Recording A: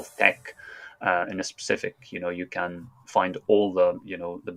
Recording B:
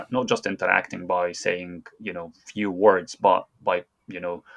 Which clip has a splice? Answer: B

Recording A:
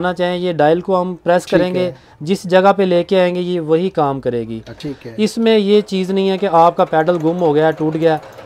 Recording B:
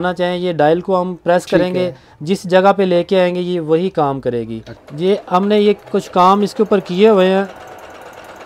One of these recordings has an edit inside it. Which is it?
A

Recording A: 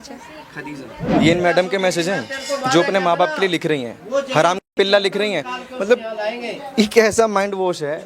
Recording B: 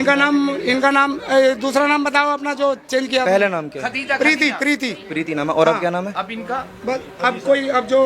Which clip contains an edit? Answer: A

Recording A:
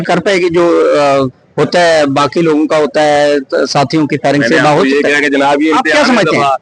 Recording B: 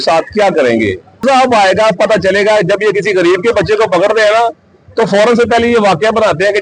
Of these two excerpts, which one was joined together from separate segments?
B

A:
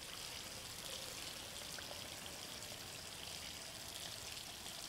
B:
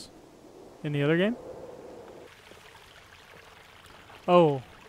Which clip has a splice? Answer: B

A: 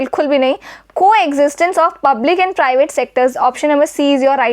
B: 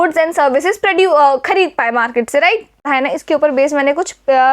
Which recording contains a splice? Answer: B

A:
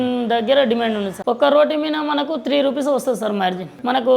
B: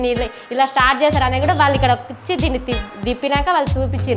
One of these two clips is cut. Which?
A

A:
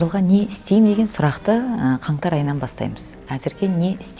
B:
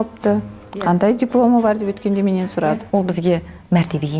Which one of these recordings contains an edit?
B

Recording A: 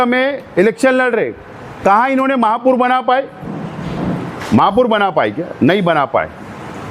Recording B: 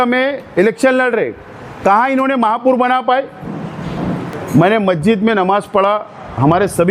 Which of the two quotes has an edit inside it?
B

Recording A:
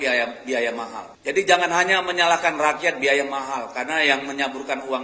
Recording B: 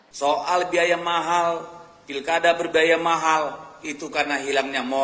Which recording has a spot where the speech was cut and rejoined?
A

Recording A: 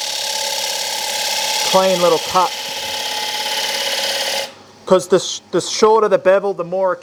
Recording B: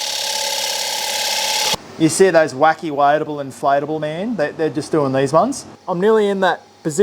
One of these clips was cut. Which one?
B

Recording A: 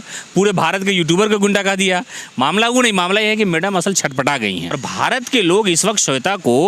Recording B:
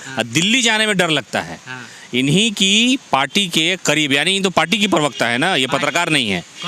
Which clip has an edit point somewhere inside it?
A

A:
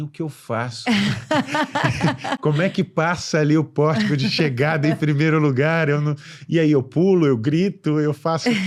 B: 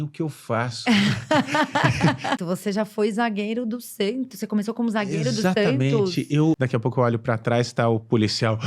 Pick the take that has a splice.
B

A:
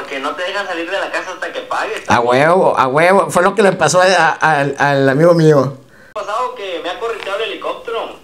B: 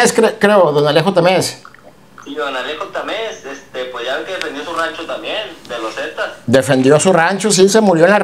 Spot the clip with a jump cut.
A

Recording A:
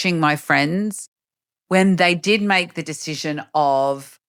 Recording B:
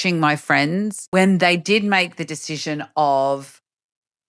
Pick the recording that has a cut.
B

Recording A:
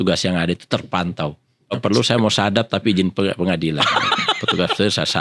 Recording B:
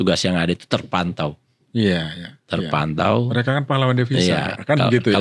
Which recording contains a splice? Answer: A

